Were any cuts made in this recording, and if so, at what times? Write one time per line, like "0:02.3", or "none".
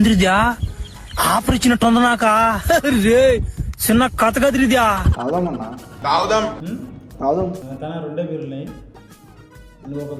0:07.6